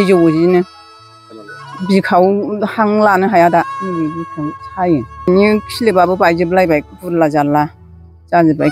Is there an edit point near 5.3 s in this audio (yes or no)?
yes